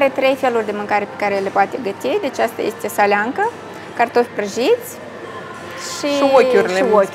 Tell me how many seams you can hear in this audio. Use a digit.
0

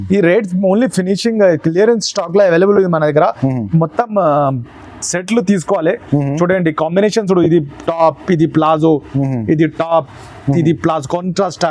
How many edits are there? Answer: 0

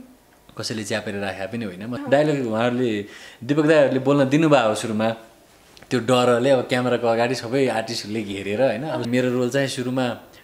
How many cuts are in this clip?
2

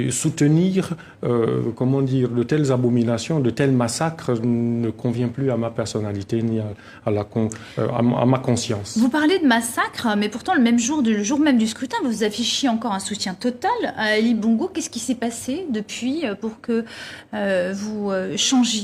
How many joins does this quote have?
1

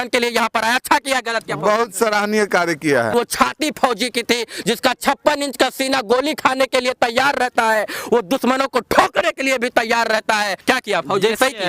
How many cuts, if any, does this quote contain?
2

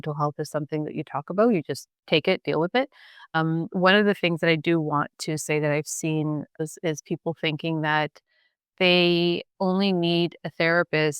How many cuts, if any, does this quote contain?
4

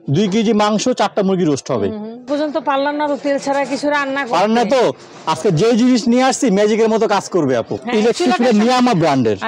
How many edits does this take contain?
2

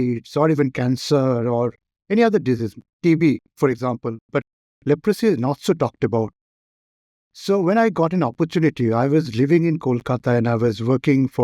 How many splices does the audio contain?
0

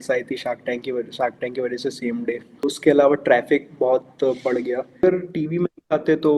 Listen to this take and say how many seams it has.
2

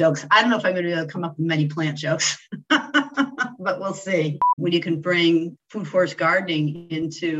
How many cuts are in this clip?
1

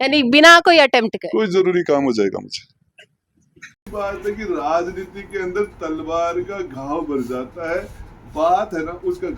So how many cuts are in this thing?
1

